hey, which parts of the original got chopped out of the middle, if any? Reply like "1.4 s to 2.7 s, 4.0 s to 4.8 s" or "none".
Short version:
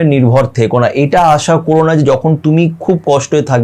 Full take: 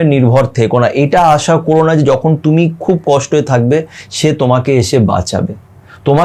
none